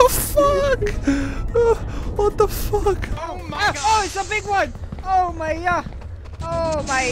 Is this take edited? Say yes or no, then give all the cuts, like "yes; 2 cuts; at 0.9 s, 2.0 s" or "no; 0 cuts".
yes; 1 cut; at 3.1 s